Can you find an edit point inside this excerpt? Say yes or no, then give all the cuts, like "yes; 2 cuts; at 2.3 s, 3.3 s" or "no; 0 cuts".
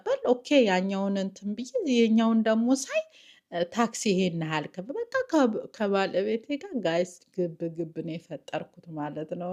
no; 0 cuts